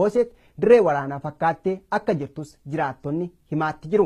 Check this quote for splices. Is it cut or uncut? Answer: uncut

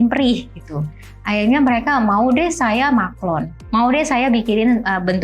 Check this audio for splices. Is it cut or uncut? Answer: cut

